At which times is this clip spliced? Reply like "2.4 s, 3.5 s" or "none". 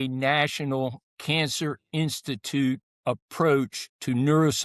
1.1 s, 2.9 s